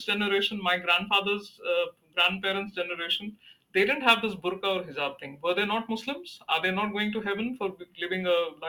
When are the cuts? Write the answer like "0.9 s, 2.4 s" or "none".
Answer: none